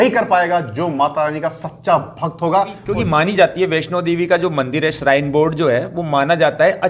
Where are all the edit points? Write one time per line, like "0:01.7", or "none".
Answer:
0:02.8